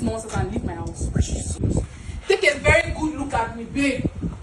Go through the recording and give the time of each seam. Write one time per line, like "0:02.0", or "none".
0:01.6